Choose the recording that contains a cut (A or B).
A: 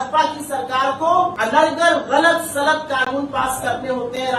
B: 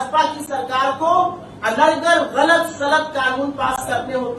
A